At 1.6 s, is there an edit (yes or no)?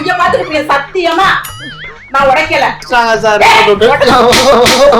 no